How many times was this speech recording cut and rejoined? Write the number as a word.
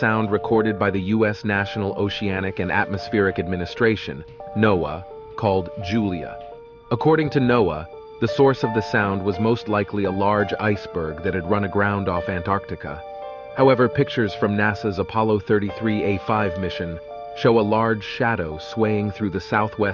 zero